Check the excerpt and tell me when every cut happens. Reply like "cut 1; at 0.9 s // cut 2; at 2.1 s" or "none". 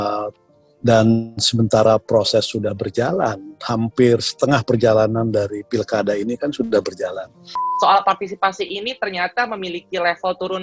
cut 1; at 7.6 s